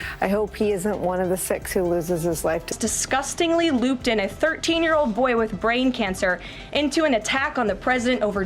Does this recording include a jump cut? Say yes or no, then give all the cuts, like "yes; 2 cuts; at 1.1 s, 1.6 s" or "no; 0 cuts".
yes; 1 cut; at 2.8 s